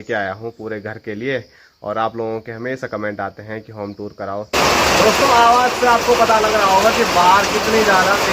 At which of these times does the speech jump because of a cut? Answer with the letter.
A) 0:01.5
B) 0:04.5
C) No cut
B